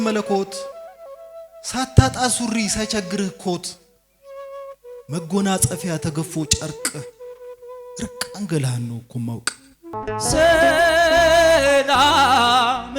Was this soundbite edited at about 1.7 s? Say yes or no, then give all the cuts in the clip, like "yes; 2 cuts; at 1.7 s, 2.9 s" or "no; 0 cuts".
no; 1 cut; at 9.9 s